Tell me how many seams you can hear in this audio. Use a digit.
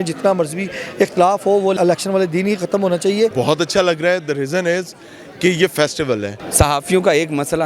3